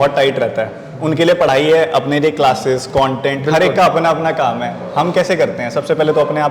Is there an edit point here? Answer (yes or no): no